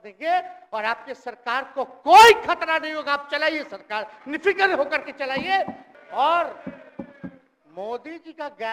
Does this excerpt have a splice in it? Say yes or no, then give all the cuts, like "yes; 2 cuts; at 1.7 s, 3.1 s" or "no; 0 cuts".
yes; 1 cut; at 5.9 s